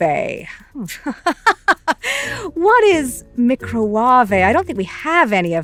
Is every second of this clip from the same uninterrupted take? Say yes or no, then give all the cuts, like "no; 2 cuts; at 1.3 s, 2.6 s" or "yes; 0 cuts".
yes; 0 cuts